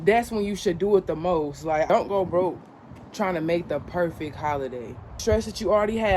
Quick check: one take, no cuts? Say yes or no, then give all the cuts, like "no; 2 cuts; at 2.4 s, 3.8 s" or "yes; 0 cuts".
no; 2 cuts; at 1.9 s, 5.2 s